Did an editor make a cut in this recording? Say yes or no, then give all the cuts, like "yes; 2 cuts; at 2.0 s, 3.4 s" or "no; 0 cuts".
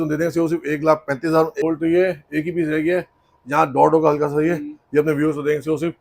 yes; 1 cut; at 1.6 s